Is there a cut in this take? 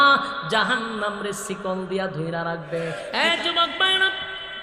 yes; 1 cut; at 3.0 s

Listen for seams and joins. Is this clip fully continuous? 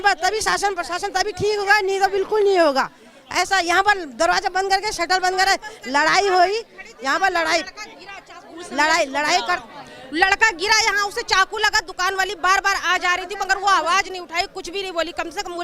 yes; 0 cuts

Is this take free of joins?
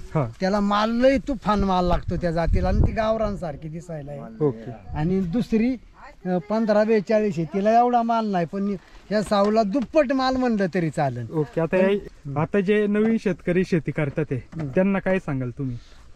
no; 1 cut; at 12.0 s

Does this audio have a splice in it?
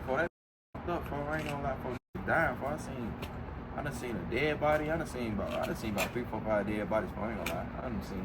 no; 0 cuts

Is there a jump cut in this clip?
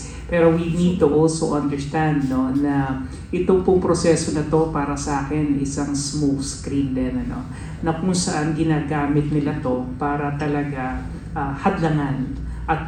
no; 0 cuts

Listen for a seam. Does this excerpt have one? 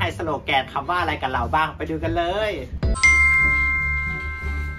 yes; 1 cut; at 2.9 s

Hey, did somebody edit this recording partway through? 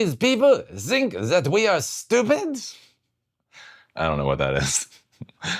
yes; 1 cut; at 4.2 s

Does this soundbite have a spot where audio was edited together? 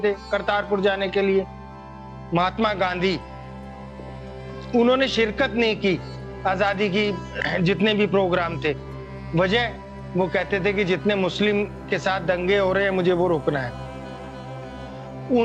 yes; 2 cuts; at 1.9 s, 7.3 s

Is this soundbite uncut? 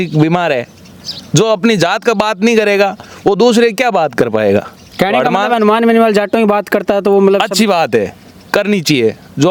yes; 0 cuts

